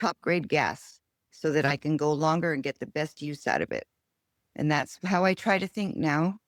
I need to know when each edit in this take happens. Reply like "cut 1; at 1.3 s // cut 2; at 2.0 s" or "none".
none

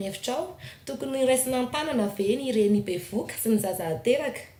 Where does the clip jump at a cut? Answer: none

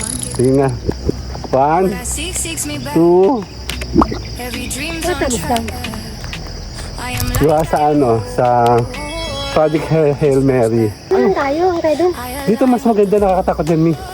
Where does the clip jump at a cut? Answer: cut 1; at 11.0 s

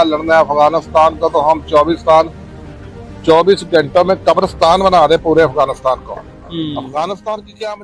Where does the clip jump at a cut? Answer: none

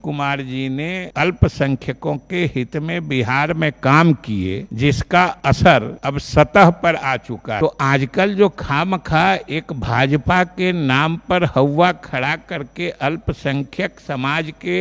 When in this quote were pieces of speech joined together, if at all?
cut 1; at 1.1 s // cut 2; at 4.7 s // cut 3; at 5.6 s // cut 4; at 7.6 s

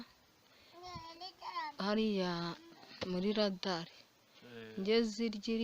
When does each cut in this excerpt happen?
none

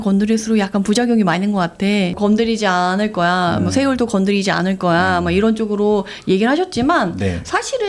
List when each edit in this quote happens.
cut 1; at 2.1 s

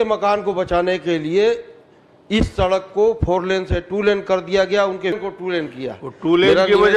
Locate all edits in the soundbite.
cut 1; at 5.1 s

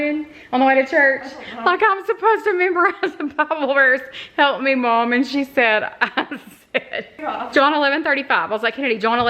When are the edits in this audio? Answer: cut 1; at 7.2 s

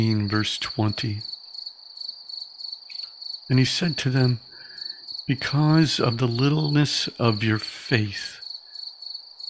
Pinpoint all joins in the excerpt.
cut 1; at 1.4 s // cut 2; at 3.5 s

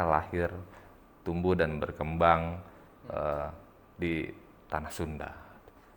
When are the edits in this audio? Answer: none

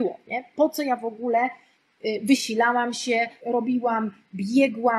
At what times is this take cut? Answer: cut 1; at 3.4 s

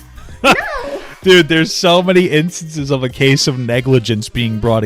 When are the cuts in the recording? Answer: none

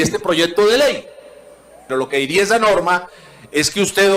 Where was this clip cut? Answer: cut 1; at 1.8 s

